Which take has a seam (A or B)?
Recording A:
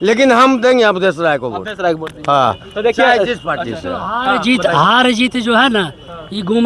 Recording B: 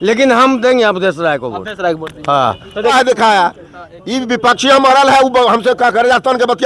B